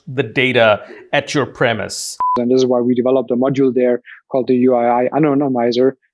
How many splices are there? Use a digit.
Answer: 1